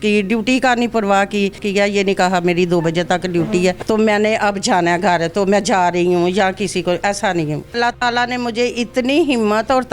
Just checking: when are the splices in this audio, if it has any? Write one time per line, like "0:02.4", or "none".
0:01.6
0:03.8
0:07.8